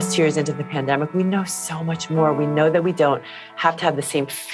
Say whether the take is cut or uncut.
uncut